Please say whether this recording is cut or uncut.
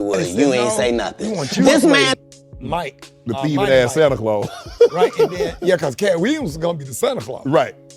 cut